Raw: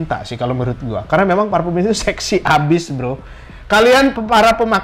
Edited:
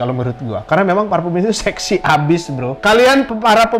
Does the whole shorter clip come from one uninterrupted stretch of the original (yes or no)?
no